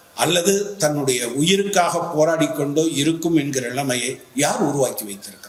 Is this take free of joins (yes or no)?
yes